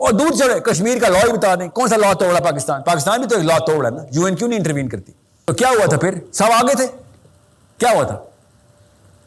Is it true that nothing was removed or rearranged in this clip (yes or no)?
no